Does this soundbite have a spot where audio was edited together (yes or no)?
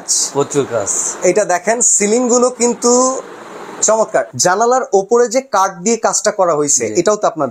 yes